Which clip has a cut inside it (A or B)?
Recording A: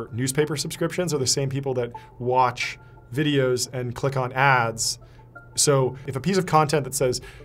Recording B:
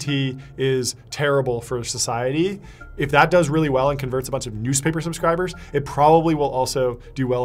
A